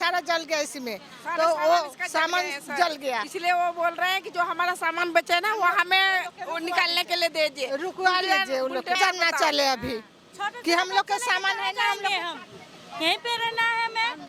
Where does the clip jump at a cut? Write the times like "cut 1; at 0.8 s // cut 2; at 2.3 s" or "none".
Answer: cut 1; at 9.0 s